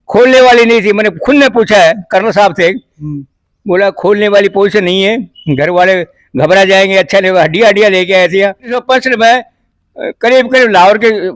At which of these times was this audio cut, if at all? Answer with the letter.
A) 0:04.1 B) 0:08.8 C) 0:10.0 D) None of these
B